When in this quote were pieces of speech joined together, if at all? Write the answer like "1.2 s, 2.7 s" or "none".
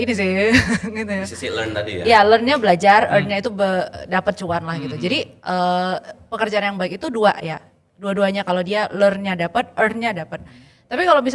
none